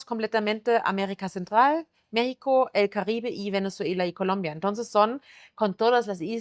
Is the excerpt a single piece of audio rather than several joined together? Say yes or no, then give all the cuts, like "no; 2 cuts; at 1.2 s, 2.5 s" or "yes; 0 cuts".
yes; 0 cuts